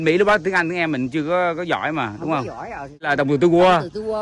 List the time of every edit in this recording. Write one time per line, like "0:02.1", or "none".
0:03.1

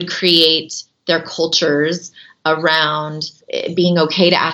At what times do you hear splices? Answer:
0:03.4

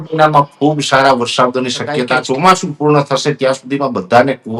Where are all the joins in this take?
0:02.2

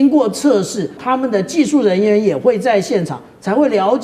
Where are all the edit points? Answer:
0:00.9

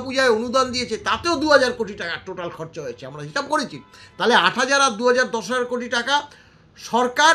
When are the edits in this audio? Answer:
none

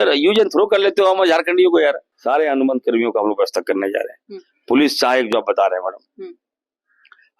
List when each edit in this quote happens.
0:02.1

